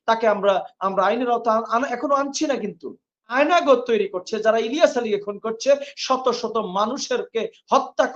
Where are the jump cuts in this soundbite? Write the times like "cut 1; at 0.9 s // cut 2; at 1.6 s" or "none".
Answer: cut 1; at 3.3 s